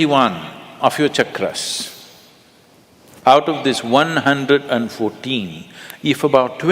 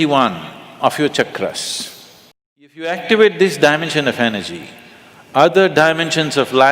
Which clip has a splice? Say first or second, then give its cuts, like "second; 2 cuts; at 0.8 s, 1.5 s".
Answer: second; 1 cut; at 2.9 s